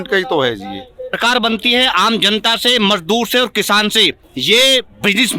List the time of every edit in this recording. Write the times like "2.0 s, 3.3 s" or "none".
1.2 s, 4.3 s